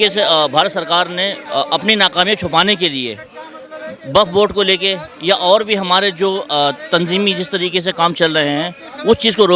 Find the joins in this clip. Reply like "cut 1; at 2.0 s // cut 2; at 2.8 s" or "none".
none